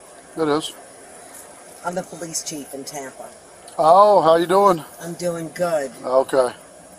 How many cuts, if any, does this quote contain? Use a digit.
1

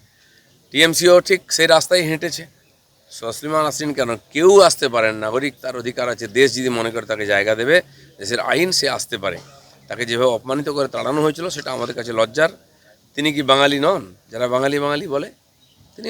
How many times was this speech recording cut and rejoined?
0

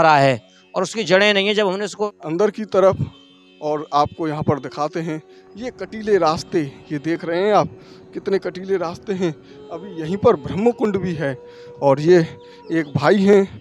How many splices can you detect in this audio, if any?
1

